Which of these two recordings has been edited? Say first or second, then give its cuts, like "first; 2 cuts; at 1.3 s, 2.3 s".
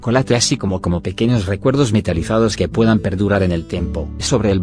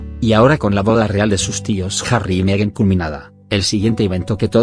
second; 1 cut; at 1.7 s